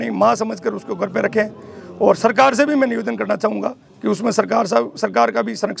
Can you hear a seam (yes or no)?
no